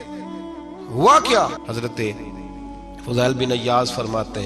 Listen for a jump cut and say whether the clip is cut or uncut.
cut